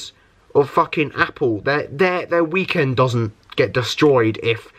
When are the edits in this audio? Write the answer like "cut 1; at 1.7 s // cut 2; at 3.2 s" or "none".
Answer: none